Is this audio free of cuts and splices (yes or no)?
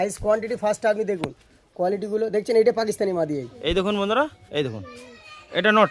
no